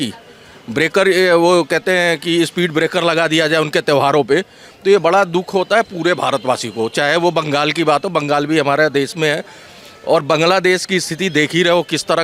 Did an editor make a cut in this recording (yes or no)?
no